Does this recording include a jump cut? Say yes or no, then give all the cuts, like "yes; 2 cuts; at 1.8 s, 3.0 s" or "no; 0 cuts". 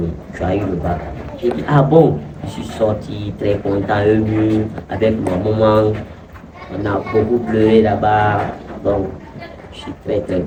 no; 0 cuts